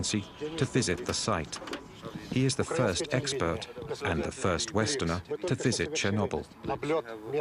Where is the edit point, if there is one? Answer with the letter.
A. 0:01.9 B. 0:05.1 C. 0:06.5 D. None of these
A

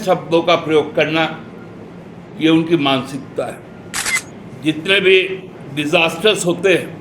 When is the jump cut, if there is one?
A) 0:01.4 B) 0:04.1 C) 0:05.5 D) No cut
B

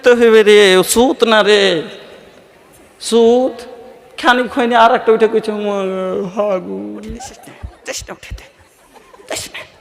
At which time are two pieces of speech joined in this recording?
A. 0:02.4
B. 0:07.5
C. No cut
B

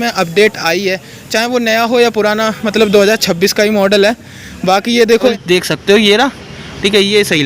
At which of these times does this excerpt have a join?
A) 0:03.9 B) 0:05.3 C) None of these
B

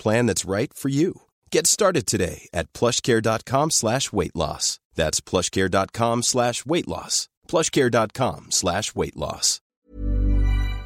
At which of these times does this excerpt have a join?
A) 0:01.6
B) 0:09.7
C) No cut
B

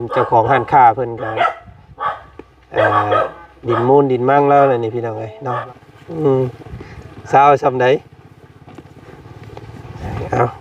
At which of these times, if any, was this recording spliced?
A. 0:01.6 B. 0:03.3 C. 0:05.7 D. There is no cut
C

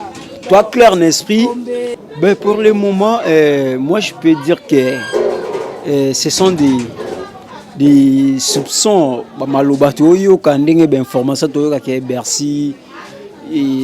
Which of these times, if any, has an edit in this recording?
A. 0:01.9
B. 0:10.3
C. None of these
A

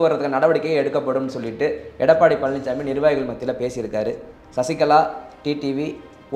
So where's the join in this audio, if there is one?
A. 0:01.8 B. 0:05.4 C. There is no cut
C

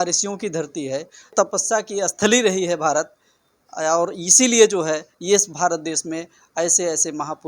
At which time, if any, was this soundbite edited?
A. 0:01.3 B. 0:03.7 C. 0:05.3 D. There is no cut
A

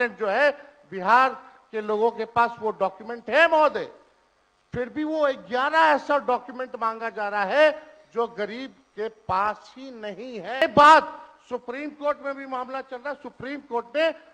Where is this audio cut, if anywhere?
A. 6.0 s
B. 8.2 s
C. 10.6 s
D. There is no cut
C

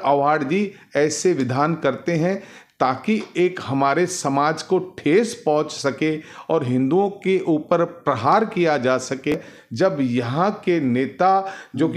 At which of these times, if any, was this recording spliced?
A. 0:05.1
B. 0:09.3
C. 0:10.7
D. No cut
B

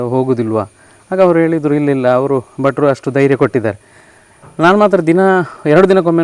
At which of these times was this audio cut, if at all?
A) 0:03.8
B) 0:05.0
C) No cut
C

